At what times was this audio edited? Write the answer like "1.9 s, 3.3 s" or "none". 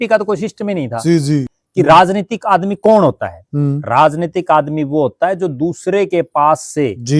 1.6 s